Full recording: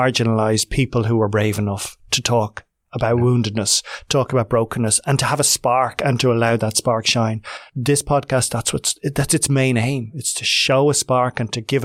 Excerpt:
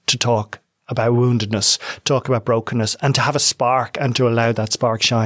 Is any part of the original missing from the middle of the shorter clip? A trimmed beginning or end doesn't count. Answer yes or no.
no